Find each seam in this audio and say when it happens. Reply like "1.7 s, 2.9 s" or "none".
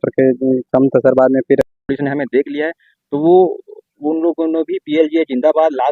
1.6 s